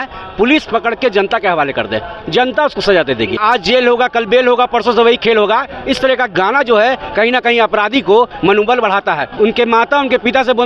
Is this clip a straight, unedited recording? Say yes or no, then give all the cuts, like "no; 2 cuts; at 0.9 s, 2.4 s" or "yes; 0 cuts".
no; 2 cuts; at 3.4 s, 9.3 s